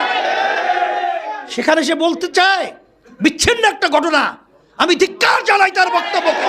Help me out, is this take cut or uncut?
uncut